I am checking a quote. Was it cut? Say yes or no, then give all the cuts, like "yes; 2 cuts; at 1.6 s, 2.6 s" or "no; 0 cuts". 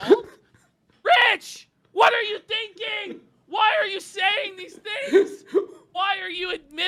no; 0 cuts